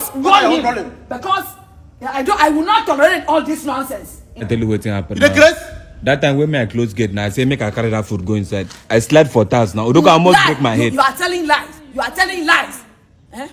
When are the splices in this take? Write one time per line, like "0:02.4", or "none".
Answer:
0:04.5